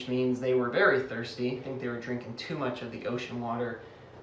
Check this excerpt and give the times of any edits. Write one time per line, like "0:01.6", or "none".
0:01.7